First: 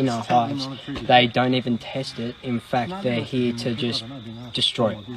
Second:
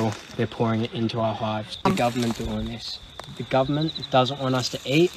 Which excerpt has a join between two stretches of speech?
second; 1 cut; at 1.7 s

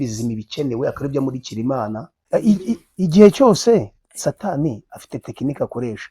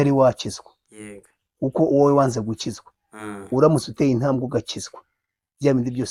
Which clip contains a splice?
first; 1 cut; at 2.1 s

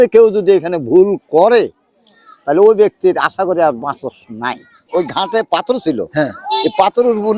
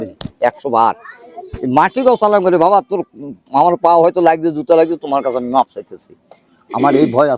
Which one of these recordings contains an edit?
first; 1 cut; at 4.8 s

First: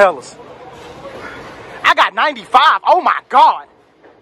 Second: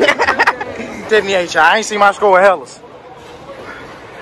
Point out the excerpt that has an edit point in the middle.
second; 1 cut; at 1.1 s

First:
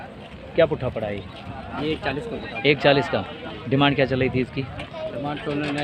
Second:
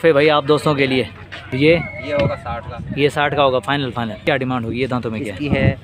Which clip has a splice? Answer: second; 2 cuts; at 1.6 s, 4.2 s

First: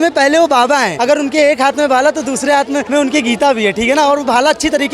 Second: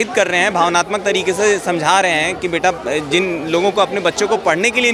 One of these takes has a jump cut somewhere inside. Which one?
first; 2 cuts; at 0.9 s, 2.9 s

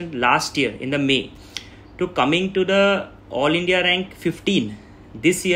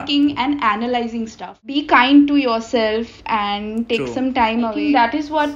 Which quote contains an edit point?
second; 2 cuts; at 1.8 s, 4.8 s

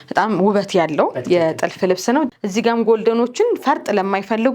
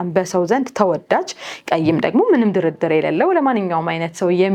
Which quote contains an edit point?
first; 1 cut; at 2.3 s

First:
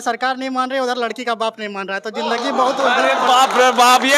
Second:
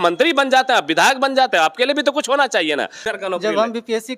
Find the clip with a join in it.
second; 1 cut; at 3.0 s

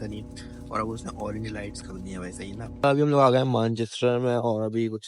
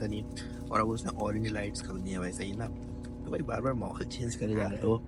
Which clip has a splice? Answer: first; 1 cut; at 2.9 s

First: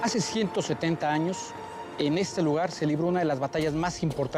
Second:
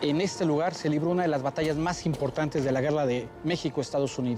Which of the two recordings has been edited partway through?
second; 1 cut; at 3.3 s

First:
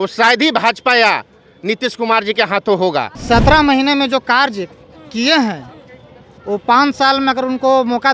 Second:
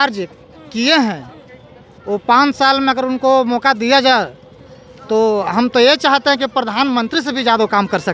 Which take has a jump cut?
first; 1 cut; at 3.2 s

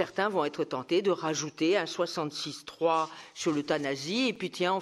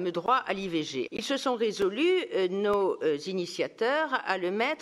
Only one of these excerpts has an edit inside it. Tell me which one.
second; 1 cut; at 1.1 s

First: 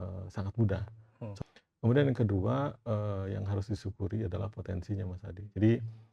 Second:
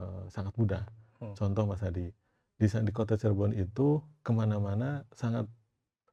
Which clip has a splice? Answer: first; 1 cut; at 1.3 s

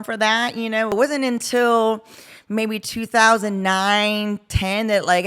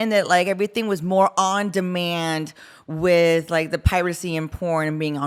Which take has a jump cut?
first; 1 cut; at 0.9 s

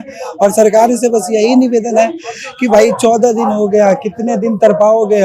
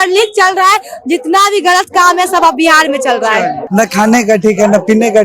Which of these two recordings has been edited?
second; 1 cut; at 3.6 s

